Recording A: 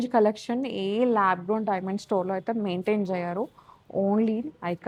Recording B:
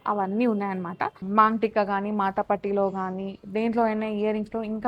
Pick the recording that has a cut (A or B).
B